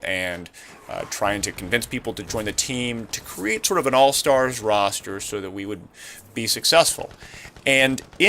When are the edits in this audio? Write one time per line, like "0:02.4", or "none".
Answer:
0:05.4